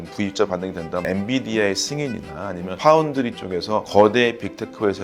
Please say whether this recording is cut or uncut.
cut